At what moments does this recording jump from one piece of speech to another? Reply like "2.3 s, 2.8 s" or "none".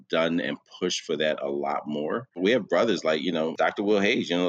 2.4 s, 3.6 s